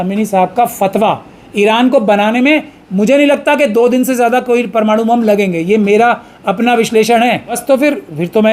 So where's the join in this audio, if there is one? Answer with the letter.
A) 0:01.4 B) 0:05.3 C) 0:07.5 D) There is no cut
C